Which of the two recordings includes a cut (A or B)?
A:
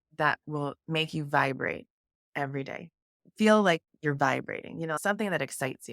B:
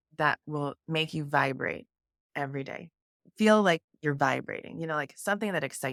A